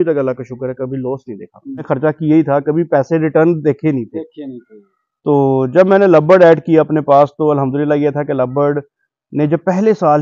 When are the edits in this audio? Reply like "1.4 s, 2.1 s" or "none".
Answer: 1.8 s